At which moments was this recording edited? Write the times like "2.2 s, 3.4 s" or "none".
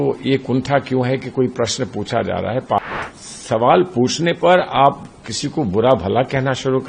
2.8 s

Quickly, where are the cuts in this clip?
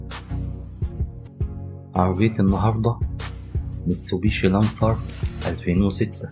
1.9 s

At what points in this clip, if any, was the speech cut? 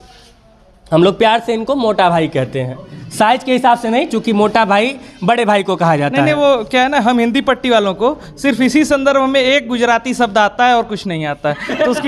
none

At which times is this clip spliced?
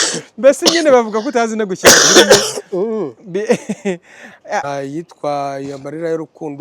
4.6 s

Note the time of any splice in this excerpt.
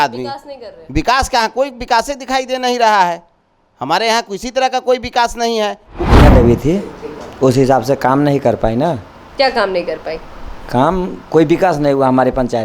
6.1 s

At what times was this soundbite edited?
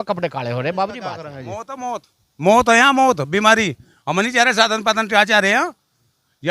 1.3 s

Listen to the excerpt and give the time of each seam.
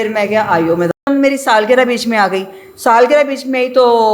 1.1 s

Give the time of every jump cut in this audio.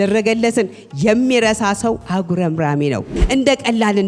3.2 s

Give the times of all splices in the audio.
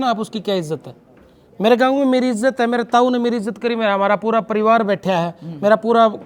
none

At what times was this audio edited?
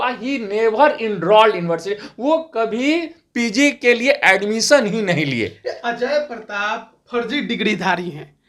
none

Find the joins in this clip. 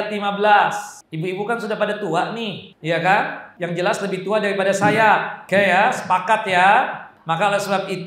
1.0 s, 2.7 s, 3.4 s, 5.3 s, 7.1 s

